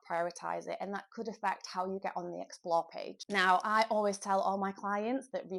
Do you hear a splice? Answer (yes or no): no